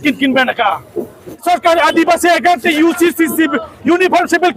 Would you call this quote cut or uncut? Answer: cut